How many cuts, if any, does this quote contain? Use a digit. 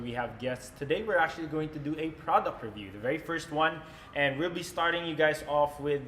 0